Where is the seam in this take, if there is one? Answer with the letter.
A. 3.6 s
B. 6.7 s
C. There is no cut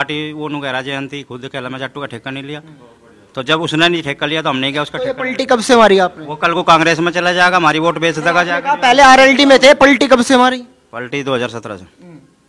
C